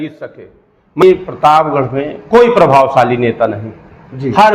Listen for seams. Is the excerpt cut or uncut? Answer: cut